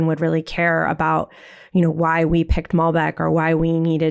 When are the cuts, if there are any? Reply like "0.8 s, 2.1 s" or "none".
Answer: none